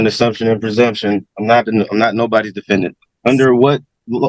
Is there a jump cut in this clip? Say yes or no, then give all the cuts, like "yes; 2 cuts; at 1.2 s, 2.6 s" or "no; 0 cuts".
yes; 1 cut; at 3.0 s